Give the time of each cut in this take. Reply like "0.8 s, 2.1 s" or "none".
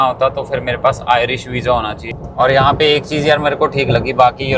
2.1 s